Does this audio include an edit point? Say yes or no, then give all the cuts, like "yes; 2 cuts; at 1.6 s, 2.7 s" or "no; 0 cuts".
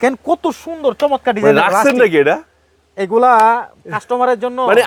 no; 0 cuts